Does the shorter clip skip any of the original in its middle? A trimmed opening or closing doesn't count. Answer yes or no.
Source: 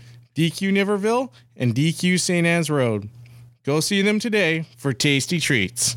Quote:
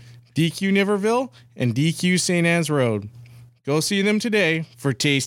no